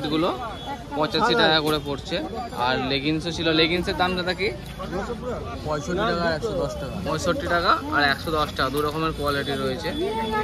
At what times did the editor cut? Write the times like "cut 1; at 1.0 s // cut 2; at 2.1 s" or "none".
none